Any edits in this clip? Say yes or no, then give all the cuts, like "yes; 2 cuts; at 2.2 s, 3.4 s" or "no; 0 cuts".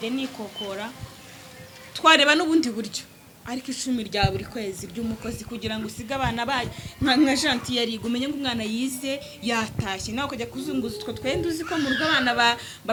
no; 0 cuts